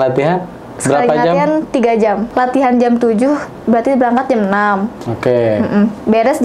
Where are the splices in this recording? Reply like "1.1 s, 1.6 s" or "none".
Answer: 2.3 s